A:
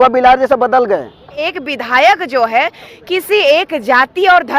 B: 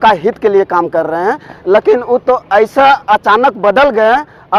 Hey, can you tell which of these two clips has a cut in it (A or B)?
A